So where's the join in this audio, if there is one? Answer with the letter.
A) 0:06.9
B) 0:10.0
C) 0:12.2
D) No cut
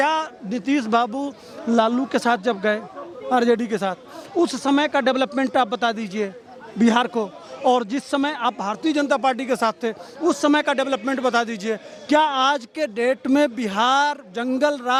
D